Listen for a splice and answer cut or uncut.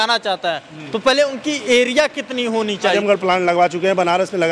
cut